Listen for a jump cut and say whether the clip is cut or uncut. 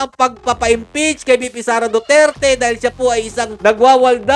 uncut